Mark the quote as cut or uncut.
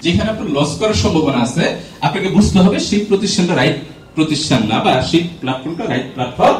uncut